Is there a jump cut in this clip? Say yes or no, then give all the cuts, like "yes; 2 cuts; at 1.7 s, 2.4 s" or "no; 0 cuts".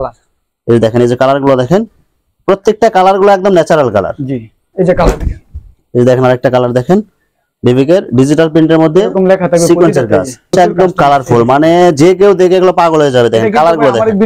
yes; 2 cuts; at 4.6 s, 10.4 s